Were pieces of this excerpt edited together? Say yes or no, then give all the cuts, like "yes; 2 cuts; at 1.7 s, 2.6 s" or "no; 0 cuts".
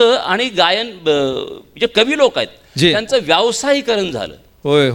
no; 0 cuts